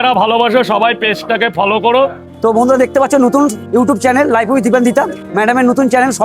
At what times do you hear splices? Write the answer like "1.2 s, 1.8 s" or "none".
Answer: 2.2 s, 3.6 s, 5.2 s